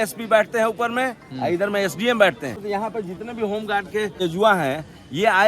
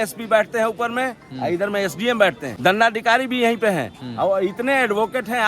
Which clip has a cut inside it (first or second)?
first